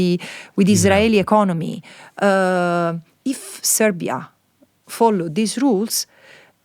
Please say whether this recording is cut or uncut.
uncut